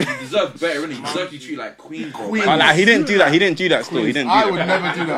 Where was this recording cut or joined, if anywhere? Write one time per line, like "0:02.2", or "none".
none